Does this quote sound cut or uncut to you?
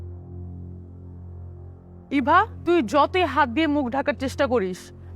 cut